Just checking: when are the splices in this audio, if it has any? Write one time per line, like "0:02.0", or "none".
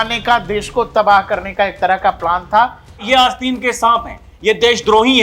0:03.0